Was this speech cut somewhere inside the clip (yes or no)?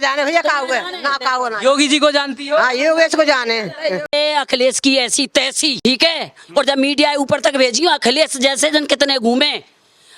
yes